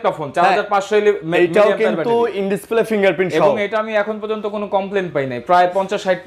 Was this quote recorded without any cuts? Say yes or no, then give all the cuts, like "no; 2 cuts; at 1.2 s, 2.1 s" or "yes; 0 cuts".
yes; 0 cuts